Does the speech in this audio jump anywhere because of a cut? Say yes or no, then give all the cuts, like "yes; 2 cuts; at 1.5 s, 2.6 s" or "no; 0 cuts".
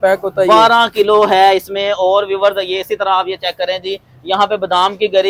no; 0 cuts